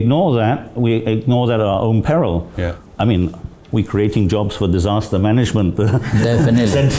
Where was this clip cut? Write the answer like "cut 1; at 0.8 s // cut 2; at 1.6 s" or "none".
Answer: cut 1; at 2.8 s